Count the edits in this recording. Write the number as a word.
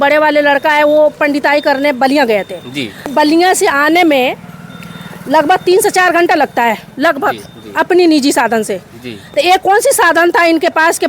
one